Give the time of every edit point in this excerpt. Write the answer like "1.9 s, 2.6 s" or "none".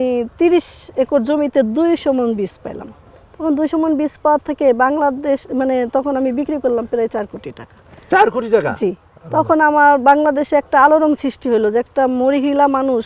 none